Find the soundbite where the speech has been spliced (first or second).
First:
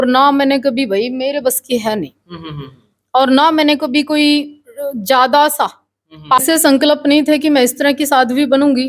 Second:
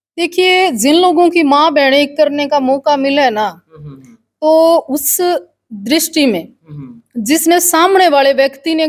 first